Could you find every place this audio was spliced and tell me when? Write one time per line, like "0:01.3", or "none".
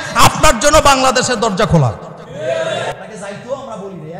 0:02.9